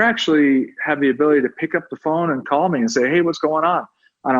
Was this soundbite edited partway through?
yes; 1 cut; at 2.4 s

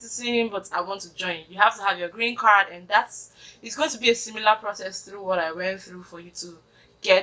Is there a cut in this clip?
no; 0 cuts

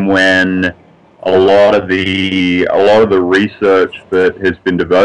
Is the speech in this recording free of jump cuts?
yes; 0 cuts

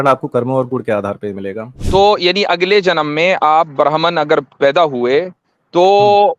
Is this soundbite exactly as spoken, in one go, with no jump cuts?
no; 1 cut; at 1.8 s

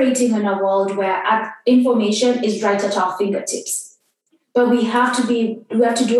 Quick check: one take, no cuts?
yes; 0 cuts

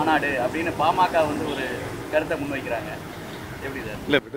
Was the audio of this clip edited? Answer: no; 0 cuts

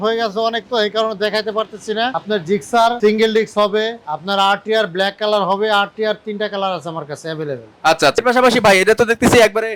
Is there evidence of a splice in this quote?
yes; 4 cuts; at 2.2 s, 3.0 s, 4.1 s, 8.2 s

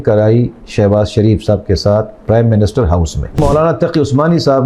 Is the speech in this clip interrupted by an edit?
yes; 1 cut; at 3.4 s

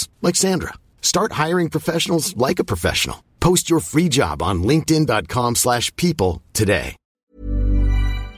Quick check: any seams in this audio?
yes; 1 cut; at 7.3 s

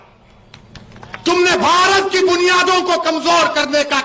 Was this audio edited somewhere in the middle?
no; 0 cuts

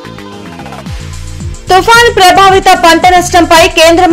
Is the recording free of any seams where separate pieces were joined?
no; 1 cut; at 1.5 s

